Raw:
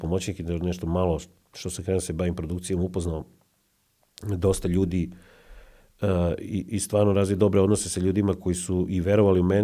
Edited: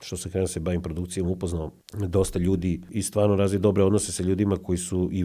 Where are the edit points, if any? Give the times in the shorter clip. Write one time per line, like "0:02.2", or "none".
0:01.8
0:02.9